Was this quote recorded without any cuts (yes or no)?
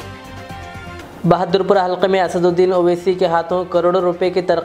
no